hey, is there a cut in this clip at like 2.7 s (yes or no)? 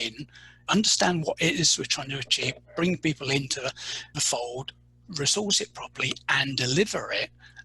no